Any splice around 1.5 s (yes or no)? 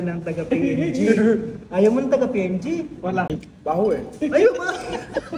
no